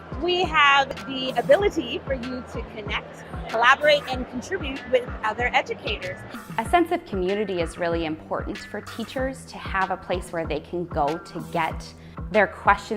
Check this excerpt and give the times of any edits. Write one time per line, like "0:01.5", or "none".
0:01.0